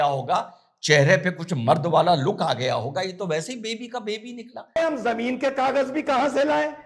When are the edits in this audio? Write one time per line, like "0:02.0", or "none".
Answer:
0:04.8